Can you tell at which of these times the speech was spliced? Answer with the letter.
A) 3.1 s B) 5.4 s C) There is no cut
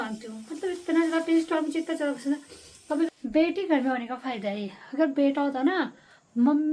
A